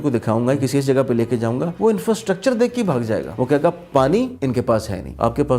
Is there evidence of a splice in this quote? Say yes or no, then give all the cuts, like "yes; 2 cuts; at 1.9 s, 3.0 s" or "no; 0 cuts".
yes; 3 cuts; at 1.7 s, 3.3 s, 4.7 s